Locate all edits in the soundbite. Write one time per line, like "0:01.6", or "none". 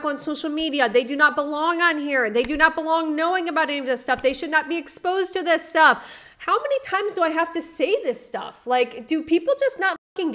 none